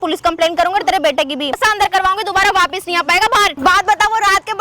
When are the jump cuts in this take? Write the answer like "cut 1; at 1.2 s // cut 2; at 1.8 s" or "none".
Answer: cut 1; at 1.6 s // cut 2; at 3.6 s